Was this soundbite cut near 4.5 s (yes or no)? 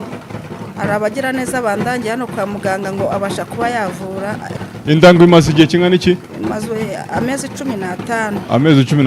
yes